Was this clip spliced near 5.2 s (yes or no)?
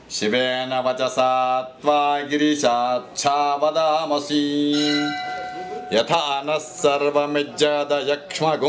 yes